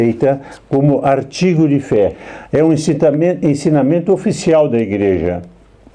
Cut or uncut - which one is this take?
cut